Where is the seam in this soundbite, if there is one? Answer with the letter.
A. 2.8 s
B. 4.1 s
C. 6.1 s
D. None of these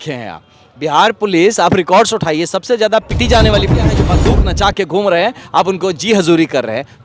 B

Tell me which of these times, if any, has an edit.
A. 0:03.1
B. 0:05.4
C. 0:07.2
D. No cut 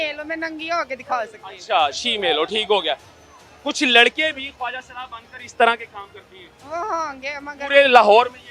D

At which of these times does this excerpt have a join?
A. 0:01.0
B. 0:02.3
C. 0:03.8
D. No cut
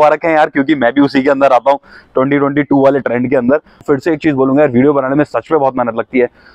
C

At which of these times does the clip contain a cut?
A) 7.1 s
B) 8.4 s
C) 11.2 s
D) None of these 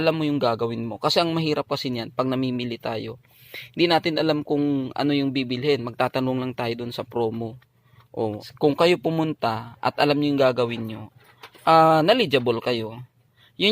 B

